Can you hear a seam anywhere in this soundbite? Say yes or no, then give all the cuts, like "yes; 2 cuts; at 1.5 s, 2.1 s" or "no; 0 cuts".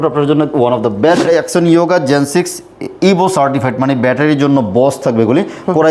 yes; 1 cut; at 1.2 s